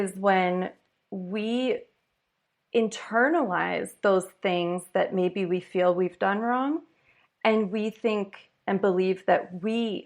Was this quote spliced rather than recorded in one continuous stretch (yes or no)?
no